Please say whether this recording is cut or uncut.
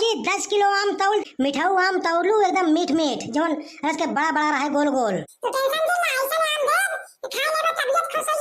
cut